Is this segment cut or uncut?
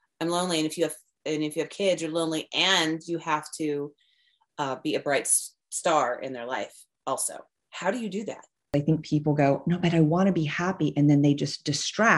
cut